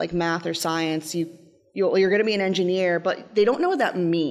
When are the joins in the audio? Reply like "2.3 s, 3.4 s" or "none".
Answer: none